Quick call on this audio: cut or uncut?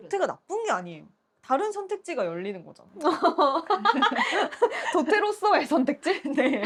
uncut